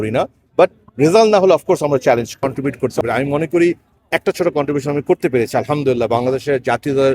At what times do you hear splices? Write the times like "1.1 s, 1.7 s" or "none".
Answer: 2.4 s